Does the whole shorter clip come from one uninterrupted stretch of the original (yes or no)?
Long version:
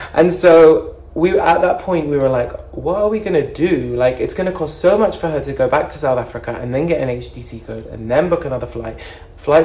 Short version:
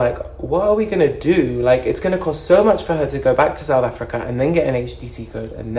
yes